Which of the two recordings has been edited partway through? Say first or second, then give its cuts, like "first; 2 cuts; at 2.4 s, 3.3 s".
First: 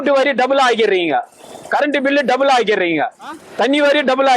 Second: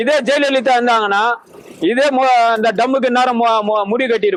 first; 1 cut; at 3.4 s